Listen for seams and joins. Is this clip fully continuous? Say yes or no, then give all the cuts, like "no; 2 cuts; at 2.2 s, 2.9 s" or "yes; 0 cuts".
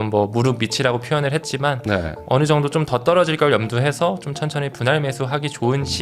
yes; 0 cuts